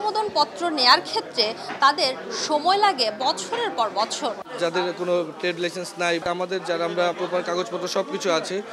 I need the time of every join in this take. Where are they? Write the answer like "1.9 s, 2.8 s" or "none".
4.4 s, 6.2 s, 7.2 s